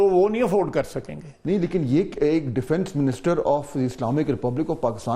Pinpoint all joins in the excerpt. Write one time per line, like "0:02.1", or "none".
none